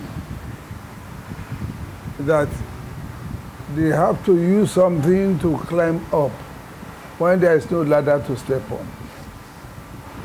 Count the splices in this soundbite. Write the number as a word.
zero